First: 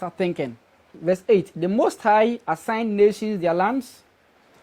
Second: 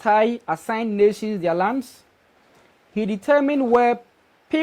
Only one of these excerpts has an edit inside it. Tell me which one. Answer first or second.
first